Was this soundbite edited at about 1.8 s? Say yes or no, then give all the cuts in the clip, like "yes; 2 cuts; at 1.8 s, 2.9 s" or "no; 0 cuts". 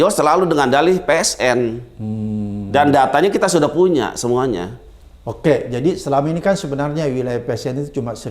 no; 0 cuts